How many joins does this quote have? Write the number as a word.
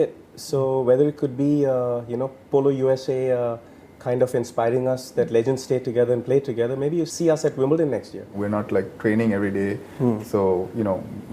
one